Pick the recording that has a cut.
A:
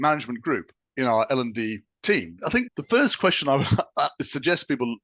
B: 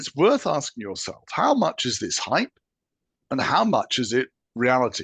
A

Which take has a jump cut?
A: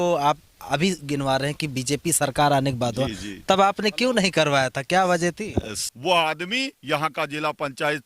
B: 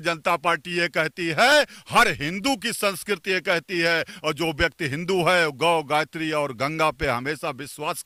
A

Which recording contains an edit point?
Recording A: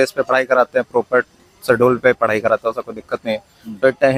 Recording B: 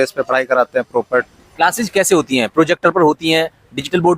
B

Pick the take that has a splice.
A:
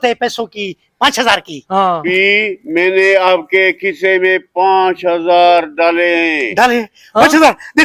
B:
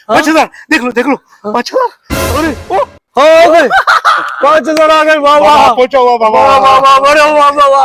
A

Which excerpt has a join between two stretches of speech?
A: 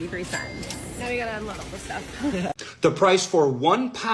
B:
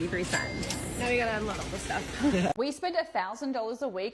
B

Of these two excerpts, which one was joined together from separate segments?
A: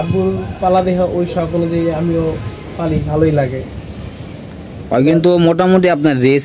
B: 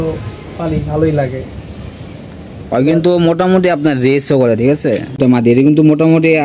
B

